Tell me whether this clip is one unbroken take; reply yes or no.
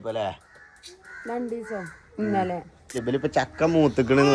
no